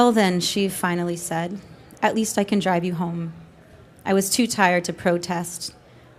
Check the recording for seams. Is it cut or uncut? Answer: uncut